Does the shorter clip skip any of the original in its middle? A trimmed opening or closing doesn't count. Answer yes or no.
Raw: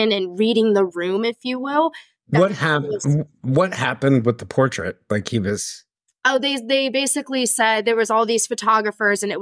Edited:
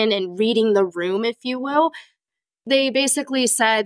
yes